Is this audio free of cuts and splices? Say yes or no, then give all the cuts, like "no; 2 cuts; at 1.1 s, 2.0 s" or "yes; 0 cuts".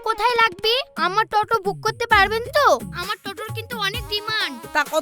yes; 0 cuts